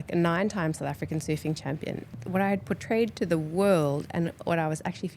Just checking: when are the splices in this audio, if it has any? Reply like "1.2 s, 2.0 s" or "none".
2.1 s